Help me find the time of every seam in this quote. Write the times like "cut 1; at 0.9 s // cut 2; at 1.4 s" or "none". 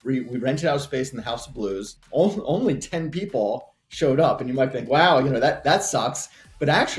cut 1; at 2.0 s